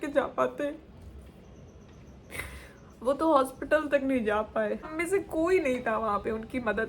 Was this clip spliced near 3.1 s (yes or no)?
no